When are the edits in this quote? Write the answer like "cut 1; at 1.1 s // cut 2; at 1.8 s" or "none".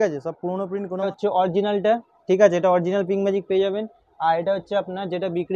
cut 1; at 1.1 s